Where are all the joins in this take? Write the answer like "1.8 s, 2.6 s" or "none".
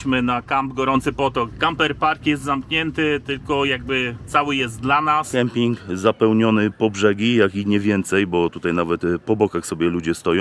1.5 s, 5.3 s

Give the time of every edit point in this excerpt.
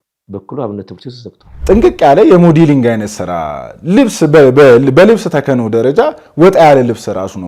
1.5 s

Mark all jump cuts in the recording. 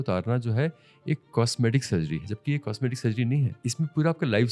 2.3 s, 3.6 s

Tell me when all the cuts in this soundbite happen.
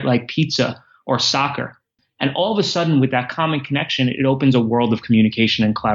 2.0 s

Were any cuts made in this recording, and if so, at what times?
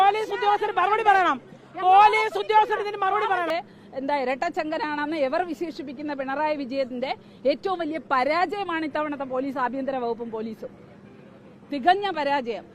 3.5 s

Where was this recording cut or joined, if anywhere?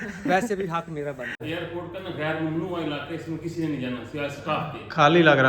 1.5 s

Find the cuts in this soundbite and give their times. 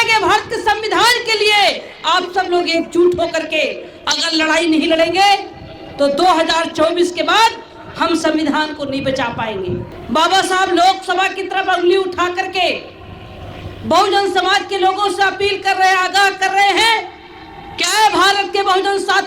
9.9 s

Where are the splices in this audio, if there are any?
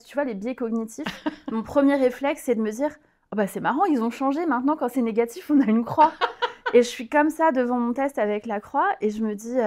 none

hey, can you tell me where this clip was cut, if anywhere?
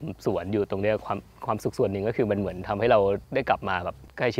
3.5 s

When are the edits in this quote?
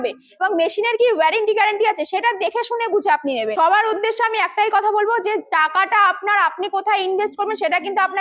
3.5 s

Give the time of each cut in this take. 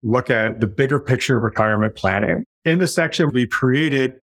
2.5 s, 3.3 s

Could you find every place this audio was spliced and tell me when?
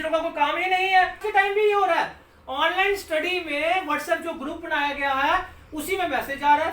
1.2 s

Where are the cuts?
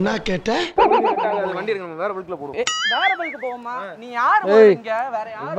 1.2 s

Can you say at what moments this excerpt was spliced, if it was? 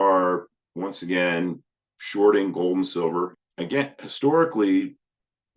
3.4 s

